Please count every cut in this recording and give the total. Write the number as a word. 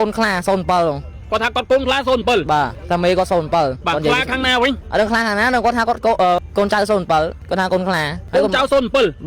five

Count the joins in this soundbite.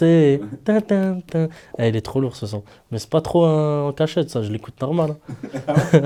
zero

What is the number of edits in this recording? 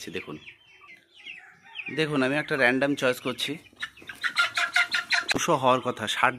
one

